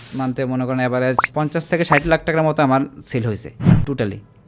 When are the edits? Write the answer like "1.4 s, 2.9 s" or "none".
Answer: 1.2 s, 3.5 s